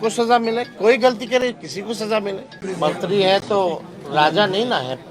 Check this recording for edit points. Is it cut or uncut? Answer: cut